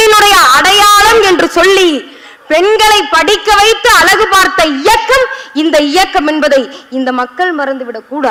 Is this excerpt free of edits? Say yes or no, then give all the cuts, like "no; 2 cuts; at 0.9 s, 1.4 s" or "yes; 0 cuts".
yes; 0 cuts